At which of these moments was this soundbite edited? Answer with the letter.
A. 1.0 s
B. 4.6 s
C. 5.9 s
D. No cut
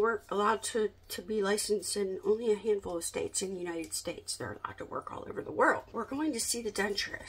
C